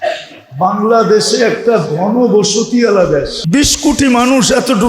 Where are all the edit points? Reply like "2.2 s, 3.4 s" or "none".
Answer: 3.4 s